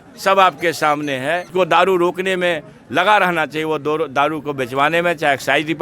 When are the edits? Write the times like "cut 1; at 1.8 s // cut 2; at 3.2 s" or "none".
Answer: cut 1; at 1.5 s